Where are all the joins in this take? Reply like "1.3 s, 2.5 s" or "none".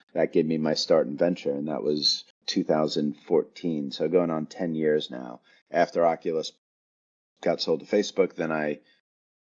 2.3 s